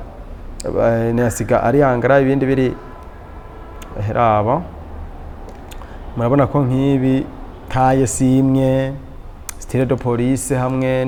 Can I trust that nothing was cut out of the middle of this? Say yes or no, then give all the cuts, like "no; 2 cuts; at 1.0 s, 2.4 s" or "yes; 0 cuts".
yes; 0 cuts